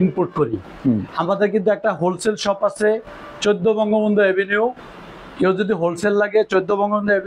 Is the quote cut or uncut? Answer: uncut